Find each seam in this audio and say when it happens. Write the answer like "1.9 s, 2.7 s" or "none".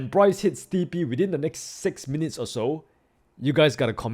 none